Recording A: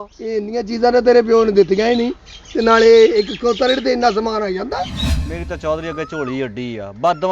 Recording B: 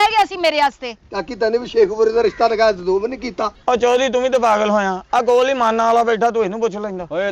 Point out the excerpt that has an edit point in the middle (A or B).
A